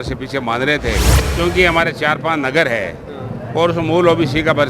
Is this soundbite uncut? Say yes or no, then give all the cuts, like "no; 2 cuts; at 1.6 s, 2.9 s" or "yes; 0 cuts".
no; 1 cut; at 1.2 s